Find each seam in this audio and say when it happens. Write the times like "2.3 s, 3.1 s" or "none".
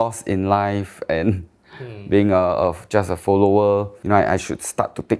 4.0 s